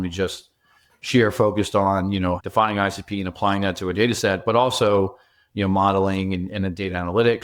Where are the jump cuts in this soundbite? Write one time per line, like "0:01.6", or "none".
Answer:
none